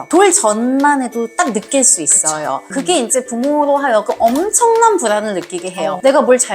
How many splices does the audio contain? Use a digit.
1